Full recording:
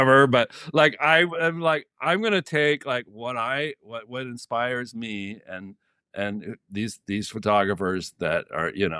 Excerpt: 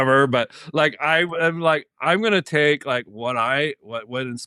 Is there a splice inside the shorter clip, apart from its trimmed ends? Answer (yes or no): no